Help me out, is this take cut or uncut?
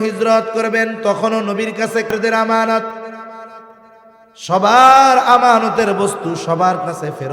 cut